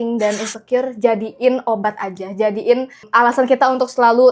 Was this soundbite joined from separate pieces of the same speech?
yes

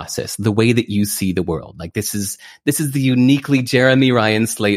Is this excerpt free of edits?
yes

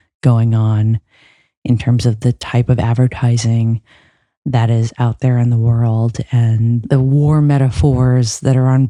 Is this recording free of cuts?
yes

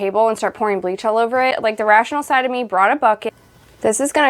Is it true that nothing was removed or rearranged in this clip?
no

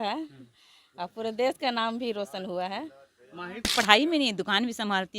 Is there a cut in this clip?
yes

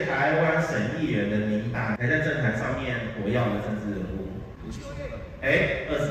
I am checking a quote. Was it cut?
no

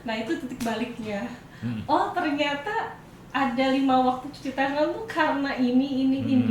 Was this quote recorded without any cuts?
yes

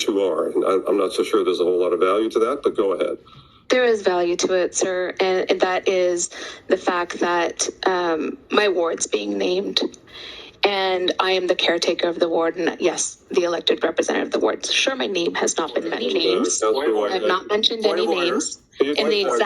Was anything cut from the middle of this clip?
yes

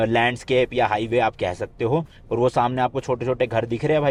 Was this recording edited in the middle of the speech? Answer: no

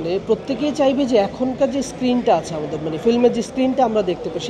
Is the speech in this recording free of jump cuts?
yes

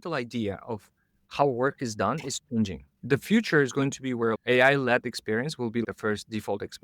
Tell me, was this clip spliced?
yes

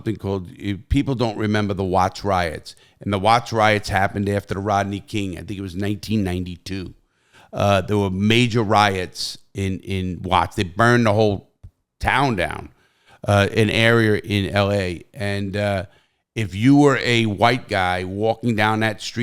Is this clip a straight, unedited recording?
yes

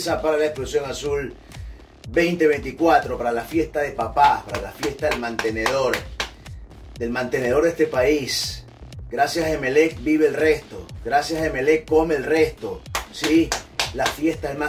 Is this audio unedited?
yes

